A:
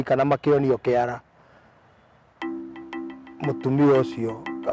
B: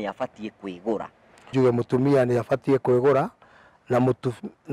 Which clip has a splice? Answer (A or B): B